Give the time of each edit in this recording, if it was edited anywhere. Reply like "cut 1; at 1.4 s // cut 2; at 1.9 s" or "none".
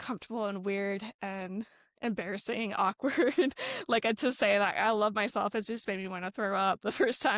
none